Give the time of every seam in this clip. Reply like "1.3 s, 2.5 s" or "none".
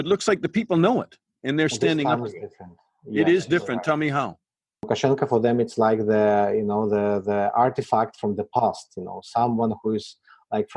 4.9 s